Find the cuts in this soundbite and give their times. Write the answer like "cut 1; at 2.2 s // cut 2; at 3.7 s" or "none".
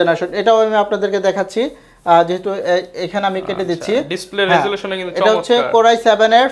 none